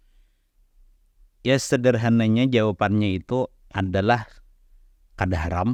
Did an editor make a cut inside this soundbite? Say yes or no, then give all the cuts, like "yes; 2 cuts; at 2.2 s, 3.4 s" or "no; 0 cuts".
no; 0 cuts